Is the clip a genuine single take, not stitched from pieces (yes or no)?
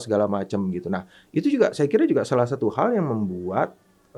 yes